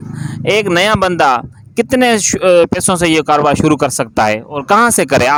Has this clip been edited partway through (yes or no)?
no